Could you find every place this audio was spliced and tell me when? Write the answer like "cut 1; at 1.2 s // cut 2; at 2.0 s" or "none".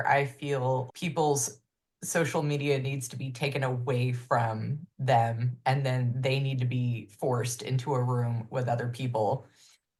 none